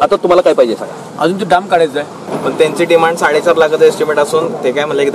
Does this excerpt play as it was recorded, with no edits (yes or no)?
no